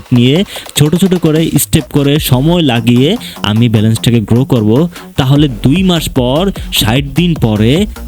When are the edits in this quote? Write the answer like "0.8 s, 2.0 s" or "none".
none

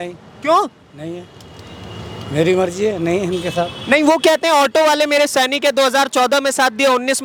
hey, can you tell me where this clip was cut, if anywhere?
none

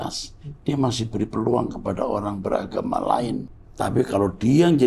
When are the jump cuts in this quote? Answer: 3.6 s

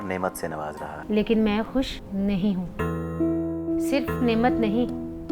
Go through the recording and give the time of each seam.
0.9 s, 3.6 s

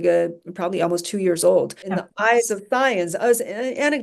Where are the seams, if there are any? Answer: 2.0 s

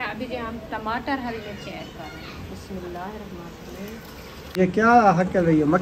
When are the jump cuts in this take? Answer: 4.3 s

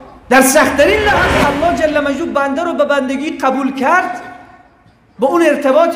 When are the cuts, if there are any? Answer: 1.2 s

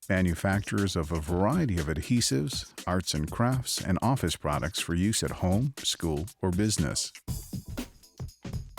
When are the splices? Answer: none

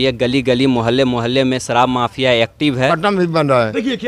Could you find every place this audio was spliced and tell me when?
2.9 s

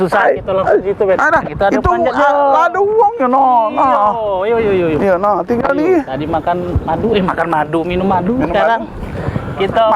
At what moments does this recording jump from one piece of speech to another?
none

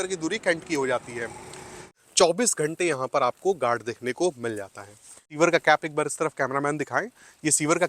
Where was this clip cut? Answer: 1.9 s, 5.3 s

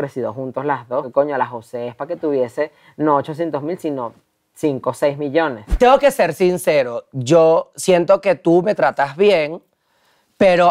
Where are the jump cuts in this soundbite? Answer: 1.1 s, 5.6 s

